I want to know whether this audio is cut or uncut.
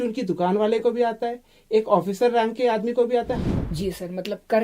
cut